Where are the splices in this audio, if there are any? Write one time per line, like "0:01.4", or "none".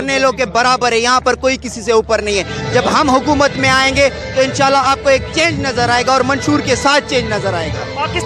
none

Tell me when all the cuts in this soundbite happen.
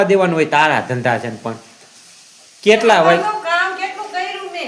none

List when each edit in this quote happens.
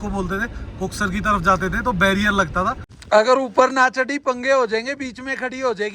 0:02.9

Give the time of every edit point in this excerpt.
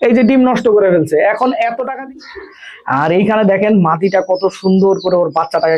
0:01.8

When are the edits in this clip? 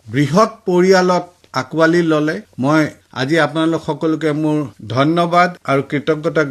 0:03.0

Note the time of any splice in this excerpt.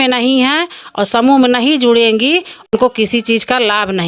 0:02.7

